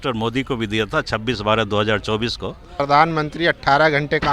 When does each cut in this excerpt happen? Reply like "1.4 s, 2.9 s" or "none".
2.8 s